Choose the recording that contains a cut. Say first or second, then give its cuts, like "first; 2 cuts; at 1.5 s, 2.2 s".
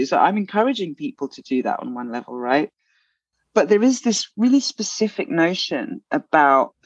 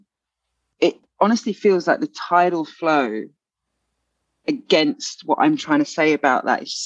second; 1 cut; at 1.0 s